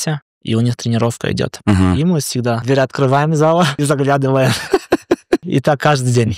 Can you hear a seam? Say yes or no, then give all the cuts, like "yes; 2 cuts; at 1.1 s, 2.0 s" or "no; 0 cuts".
yes; 3 cuts; at 2.6 s, 3.8 s, 5.4 s